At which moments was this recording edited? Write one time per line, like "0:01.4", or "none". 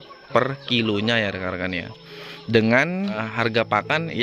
0:03.2